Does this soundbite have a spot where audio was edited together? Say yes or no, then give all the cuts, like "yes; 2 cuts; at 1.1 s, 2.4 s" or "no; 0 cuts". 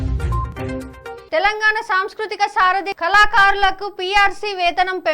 yes; 1 cut; at 1.2 s